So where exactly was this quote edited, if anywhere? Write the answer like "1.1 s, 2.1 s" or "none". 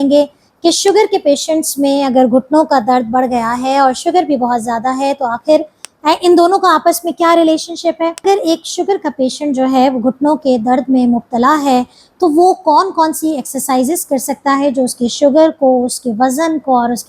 8.2 s